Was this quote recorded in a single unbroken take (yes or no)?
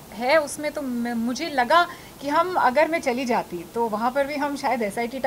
yes